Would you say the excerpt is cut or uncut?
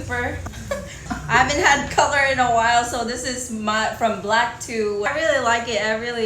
cut